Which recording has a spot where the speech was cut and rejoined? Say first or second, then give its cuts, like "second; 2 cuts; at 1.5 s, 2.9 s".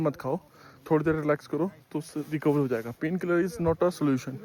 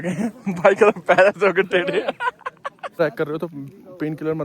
second; 1 cut; at 2.9 s